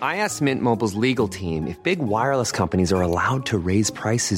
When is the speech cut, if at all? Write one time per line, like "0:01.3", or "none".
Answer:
none